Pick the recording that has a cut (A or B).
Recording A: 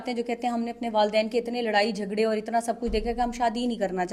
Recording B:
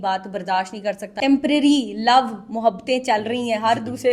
B